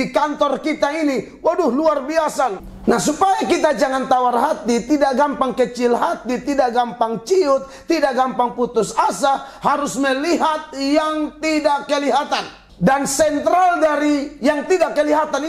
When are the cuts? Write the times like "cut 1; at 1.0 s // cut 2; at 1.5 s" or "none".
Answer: cut 1; at 2.6 s // cut 2; at 12.6 s